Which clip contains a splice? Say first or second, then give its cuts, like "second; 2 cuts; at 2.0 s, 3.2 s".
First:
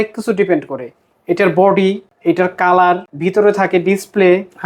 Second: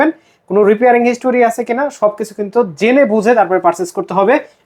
first; 2 cuts; at 2.1 s, 3.1 s